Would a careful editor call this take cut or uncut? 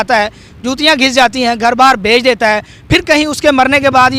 uncut